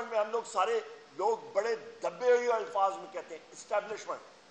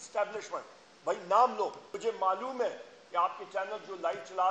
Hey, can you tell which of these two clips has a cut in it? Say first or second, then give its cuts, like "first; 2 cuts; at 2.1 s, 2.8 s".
second; 1 cut; at 1.9 s